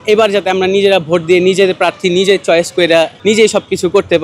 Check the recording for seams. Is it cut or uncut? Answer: cut